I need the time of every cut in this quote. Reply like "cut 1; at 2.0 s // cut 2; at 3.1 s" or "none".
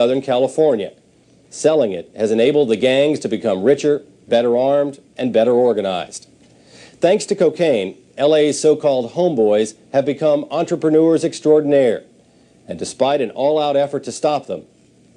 cut 1; at 10.5 s